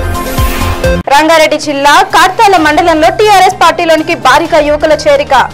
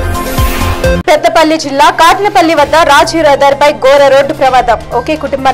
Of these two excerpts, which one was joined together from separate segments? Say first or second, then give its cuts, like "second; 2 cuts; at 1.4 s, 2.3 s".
second; 1 cut; at 0.9 s